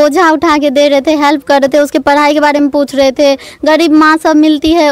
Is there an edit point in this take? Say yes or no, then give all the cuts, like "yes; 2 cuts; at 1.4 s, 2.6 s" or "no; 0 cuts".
no; 0 cuts